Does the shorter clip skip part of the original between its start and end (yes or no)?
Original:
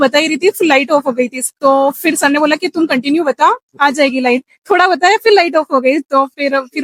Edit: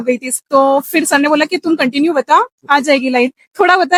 no